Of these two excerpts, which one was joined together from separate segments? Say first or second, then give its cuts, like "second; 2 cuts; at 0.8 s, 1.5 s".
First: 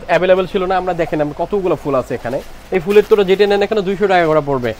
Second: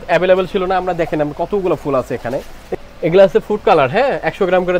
second; 1 cut; at 2.6 s